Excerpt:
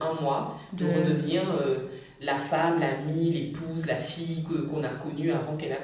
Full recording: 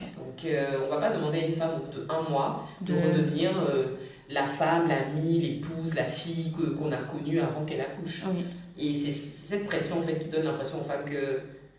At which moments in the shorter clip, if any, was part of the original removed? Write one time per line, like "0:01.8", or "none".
none